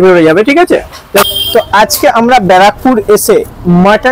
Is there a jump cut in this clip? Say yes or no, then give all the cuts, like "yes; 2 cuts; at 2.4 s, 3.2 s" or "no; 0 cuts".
yes; 1 cut; at 1.2 s